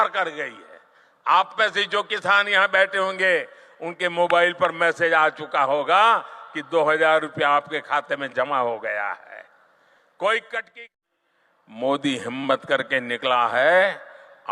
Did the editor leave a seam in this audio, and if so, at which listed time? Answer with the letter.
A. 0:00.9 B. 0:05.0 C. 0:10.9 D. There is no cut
C